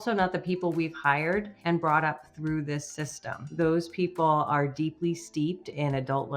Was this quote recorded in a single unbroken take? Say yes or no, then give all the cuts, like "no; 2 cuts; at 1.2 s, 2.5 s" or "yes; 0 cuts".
no; 2 cuts; at 1.5 s, 3.5 s